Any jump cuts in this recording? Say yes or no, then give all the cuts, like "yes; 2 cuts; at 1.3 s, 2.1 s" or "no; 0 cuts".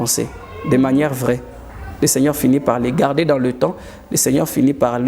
no; 0 cuts